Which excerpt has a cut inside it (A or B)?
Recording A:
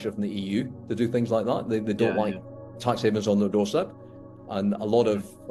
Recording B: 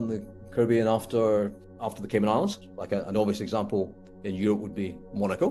B